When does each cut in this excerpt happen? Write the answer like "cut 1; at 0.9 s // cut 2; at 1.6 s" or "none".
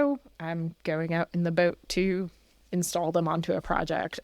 none